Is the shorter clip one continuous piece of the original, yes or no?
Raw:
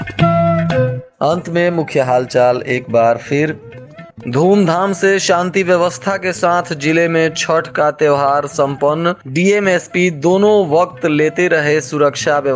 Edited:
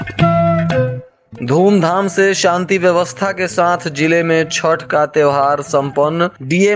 no